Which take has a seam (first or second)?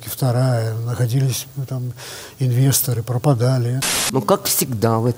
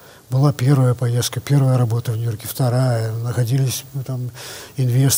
first